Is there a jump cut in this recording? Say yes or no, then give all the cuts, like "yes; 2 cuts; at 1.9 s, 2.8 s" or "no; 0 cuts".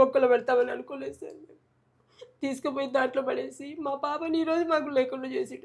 no; 0 cuts